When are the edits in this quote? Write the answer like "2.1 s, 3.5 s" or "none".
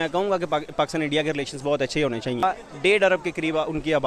none